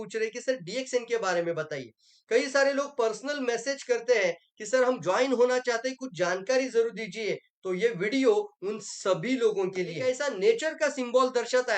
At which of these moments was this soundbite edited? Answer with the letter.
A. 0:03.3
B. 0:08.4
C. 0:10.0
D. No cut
C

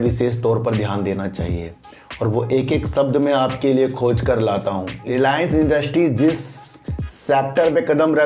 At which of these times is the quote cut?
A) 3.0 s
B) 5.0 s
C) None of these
B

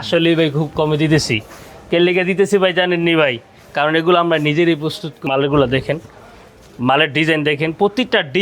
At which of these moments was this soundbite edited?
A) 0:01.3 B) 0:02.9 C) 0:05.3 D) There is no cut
C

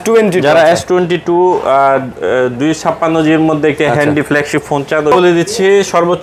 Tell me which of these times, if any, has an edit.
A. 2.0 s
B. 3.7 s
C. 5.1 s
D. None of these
C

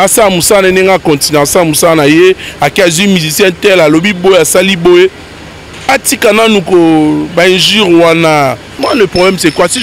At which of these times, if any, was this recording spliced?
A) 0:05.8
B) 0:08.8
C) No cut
B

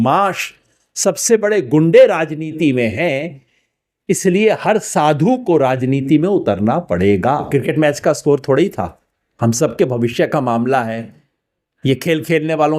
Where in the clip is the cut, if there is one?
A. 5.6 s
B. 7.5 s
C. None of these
B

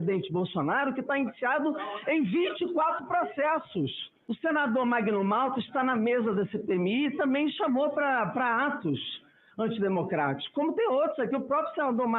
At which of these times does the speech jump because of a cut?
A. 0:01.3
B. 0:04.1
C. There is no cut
B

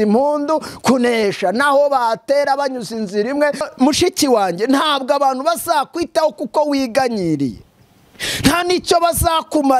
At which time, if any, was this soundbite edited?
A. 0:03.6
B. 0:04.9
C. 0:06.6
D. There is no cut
A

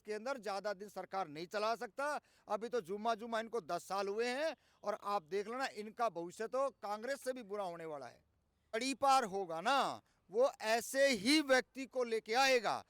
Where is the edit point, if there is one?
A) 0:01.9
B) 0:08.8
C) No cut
B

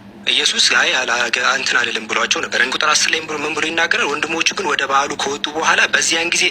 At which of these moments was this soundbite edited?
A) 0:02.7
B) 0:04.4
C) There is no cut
A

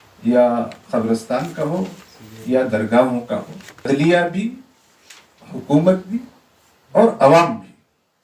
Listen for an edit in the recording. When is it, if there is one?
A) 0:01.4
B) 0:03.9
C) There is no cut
B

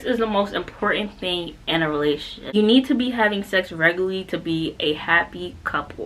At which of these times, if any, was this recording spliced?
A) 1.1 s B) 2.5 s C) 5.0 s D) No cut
B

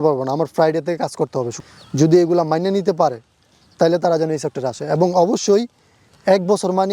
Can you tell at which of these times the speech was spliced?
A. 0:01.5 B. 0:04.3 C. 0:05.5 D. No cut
A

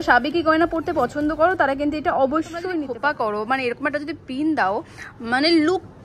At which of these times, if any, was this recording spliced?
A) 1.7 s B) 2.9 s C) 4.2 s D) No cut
B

